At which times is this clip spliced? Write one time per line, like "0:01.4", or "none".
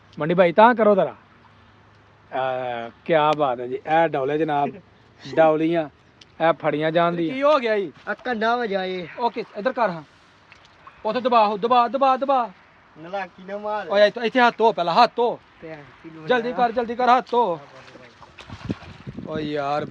0:07.3